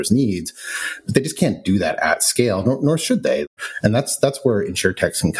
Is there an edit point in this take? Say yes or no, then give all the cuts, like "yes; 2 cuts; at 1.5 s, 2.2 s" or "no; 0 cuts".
yes; 1 cut; at 3.5 s